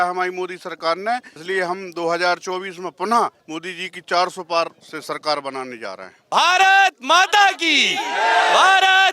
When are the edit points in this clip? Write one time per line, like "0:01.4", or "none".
0:01.3
0:03.5
0:04.9
0:06.1